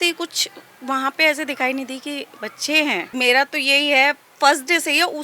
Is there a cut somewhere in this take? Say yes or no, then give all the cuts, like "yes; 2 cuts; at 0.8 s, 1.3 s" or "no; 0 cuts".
yes; 1 cut; at 3.1 s